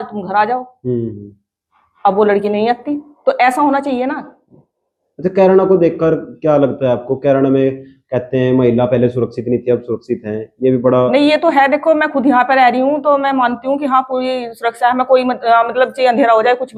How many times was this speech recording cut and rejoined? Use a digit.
0